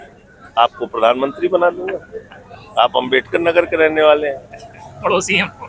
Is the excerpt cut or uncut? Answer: uncut